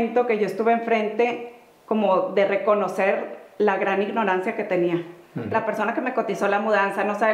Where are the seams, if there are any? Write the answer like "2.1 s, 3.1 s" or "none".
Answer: 5.5 s